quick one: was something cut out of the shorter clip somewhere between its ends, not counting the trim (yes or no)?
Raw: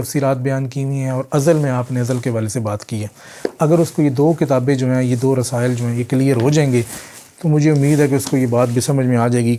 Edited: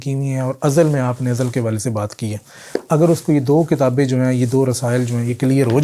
no